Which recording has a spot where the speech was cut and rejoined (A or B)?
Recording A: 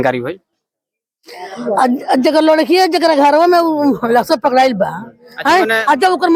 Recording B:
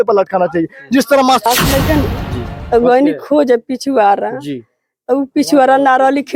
B